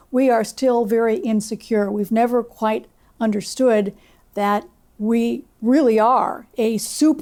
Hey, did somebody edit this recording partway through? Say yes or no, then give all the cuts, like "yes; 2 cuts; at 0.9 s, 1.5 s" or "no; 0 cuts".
no; 0 cuts